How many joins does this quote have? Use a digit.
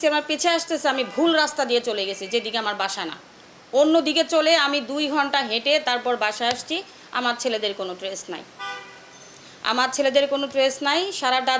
0